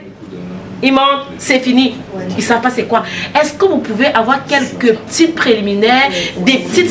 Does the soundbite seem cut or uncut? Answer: uncut